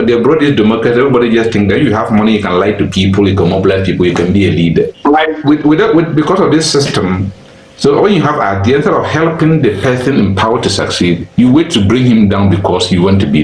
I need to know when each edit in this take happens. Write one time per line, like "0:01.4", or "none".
none